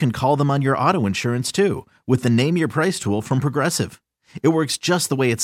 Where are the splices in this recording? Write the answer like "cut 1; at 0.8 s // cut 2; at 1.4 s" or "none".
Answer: none